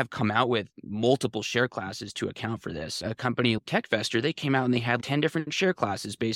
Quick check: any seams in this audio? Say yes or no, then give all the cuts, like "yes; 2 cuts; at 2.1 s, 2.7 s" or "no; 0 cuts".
yes; 2 cuts; at 3.6 s, 5.0 s